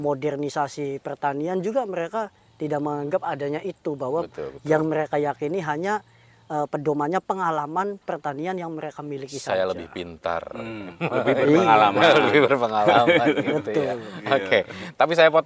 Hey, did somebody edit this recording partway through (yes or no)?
no